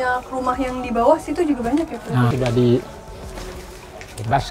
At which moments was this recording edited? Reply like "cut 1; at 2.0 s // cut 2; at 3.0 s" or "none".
cut 1; at 2.3 s